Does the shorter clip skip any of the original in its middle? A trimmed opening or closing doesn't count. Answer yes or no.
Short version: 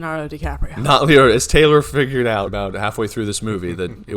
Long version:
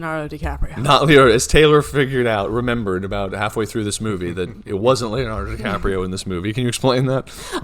yes